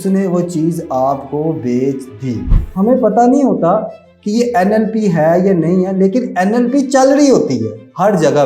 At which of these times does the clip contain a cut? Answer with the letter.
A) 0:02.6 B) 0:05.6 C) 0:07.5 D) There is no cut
A